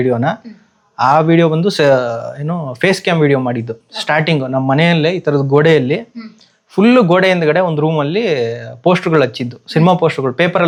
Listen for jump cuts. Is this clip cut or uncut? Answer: uncut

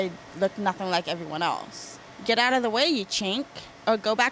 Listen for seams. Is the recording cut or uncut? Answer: cut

